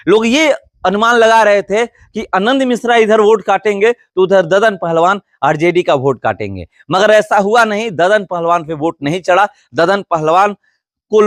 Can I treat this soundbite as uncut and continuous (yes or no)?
yes